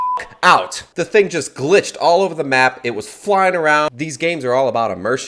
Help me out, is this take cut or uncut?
cut